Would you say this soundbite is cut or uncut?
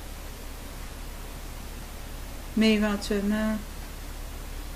cut